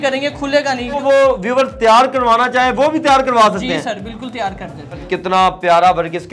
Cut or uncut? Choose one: cut